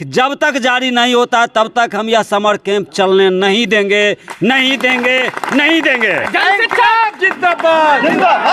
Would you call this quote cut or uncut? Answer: uncut